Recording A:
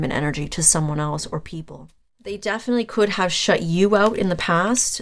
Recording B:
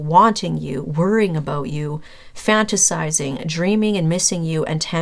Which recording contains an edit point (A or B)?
A